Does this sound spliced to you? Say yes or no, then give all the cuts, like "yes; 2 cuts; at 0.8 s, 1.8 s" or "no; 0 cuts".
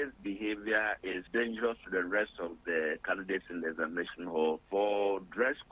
yes; 2 cuts; at 1.1 s, 4.6 s